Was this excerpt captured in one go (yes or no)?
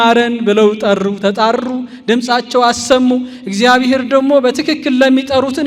yes